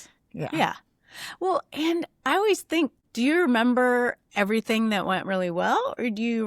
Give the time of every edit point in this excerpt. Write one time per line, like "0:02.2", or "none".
0:03.0